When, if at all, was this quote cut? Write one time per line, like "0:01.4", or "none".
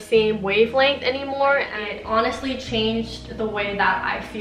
0:01.7